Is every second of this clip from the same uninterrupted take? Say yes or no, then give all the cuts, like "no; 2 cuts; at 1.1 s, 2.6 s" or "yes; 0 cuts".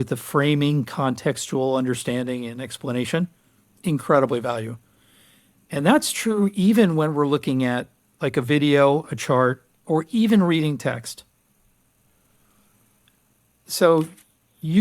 yes; 0 cuts